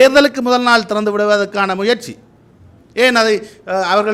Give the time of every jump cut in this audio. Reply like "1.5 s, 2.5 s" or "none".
none